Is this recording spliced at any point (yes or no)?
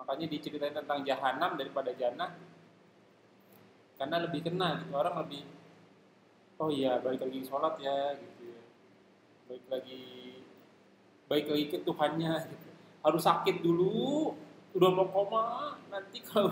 no